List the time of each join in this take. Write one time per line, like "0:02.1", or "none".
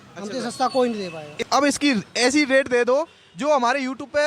0:01.4